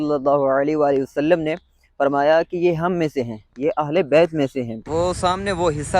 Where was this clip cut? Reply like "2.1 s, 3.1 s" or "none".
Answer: 4.8 s